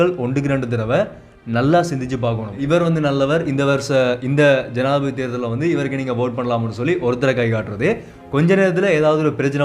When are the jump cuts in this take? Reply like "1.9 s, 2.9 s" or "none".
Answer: 2.6 s